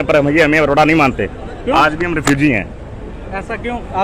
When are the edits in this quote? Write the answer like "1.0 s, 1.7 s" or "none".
none